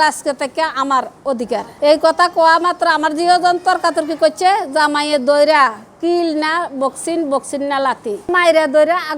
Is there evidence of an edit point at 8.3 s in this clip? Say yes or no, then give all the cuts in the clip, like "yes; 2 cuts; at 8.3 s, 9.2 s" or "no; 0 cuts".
yes; 1 cut; at 8.3 s